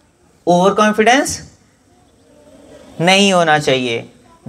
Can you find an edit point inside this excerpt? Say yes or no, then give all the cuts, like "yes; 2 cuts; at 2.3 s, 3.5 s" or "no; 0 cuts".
no; 0 cuts